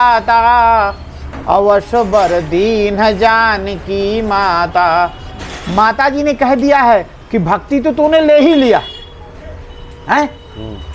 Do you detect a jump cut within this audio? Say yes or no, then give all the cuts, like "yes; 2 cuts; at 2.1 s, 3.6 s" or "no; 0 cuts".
no; 0 cuts